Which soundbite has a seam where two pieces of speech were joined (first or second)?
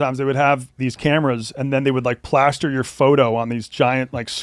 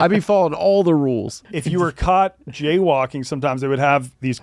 second